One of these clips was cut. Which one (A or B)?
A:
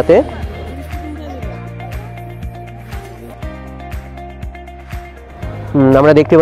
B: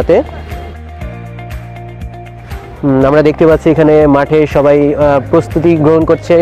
B